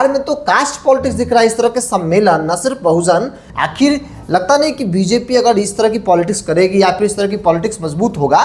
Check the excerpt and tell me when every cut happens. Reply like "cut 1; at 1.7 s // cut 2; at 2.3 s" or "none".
cut 1; at 3.4 s